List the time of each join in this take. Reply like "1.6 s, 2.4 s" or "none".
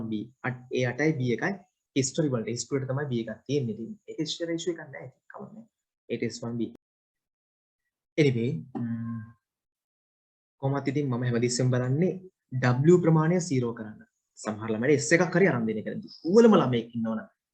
6.7 s